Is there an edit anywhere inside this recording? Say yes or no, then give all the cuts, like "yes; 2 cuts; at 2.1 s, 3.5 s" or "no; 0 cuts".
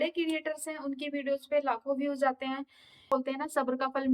yes; 1 cut; at 3.1 s